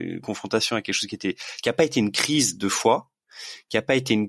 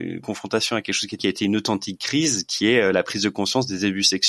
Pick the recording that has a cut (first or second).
second